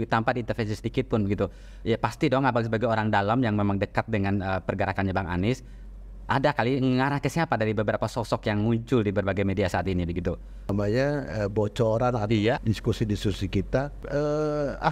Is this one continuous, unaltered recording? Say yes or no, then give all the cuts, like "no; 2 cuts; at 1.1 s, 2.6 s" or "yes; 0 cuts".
no; 3 cuts; at 10.7 s, 12.6 s, 14.0 s